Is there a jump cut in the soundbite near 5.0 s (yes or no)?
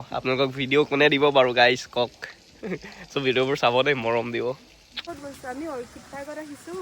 yes